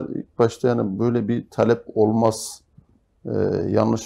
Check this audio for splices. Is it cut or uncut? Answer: uncut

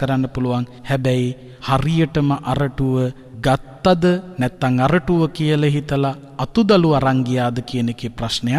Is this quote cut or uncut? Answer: cut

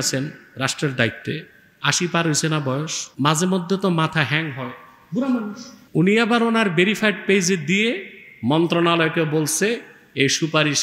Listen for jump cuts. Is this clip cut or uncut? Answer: cut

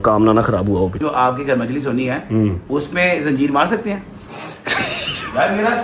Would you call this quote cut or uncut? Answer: cut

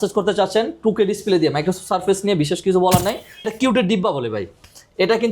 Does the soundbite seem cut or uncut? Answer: cut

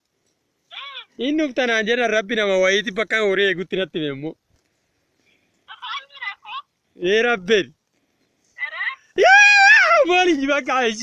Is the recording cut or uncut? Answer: uncut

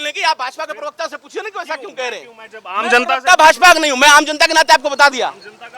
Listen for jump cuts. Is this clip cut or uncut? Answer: uncut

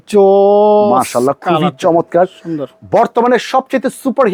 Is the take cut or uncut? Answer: uncut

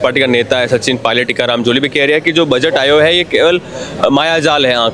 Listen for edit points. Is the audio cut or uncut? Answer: uncut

